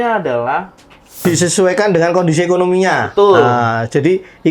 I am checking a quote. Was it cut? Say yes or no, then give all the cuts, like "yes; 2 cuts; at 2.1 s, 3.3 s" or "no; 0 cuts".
yes; 1 cut; at 1.2 s